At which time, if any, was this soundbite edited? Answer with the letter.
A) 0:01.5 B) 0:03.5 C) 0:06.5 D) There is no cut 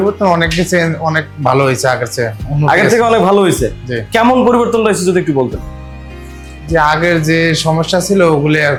D